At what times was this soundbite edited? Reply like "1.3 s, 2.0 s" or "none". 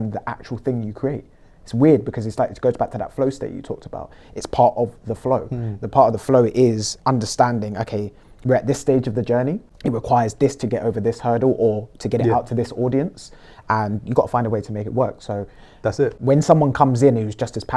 9.7 s, 16.2 s